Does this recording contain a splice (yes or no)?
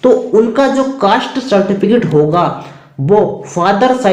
no